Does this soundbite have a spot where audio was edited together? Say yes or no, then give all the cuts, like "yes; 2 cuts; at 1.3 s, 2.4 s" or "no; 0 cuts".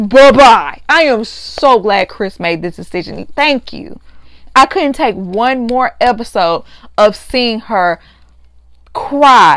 no; 0 cuts